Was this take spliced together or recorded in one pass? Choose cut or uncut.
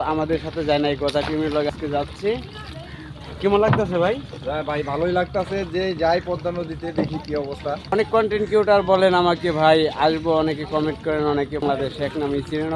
cut